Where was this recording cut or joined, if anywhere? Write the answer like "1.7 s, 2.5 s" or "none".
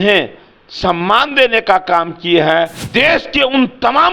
2.8 s